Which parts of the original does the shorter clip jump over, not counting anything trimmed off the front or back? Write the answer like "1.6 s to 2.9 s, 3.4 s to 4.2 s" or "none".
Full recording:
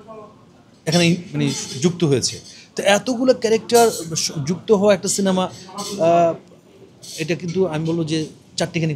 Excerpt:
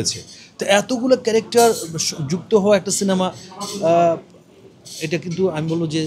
none